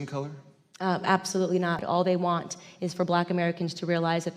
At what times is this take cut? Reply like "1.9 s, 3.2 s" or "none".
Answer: 1.8 s